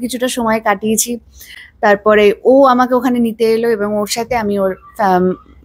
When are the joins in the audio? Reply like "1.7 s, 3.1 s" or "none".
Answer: none